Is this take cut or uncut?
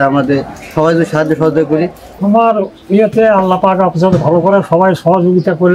cut